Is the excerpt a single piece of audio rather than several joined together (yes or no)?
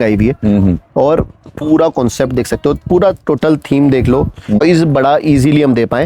no